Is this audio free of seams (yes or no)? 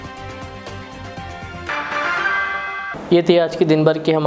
yes